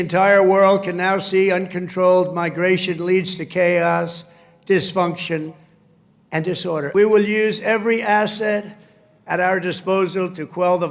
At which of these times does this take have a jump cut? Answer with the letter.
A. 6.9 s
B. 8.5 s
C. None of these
A